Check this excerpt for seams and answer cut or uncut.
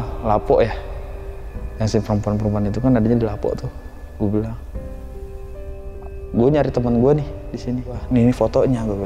cut